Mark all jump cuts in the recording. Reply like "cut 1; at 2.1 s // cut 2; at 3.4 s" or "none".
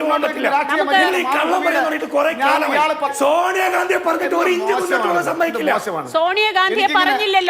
cut 1; at 3.1 s